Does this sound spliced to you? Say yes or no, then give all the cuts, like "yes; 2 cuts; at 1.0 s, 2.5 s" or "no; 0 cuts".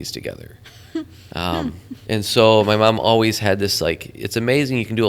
yes; 1 cut; at 1.9 s